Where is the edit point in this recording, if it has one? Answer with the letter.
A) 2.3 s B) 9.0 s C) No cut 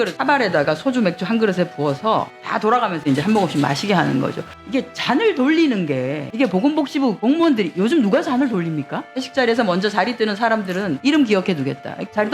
B